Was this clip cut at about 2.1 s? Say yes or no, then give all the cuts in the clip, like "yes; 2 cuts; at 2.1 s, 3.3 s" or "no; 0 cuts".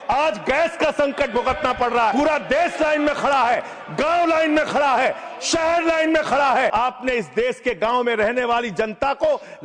yes; 2 cuts; at 2.1 s, 6.7 s